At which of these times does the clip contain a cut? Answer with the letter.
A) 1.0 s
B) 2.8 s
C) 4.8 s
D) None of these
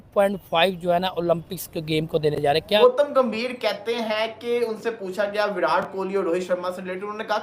B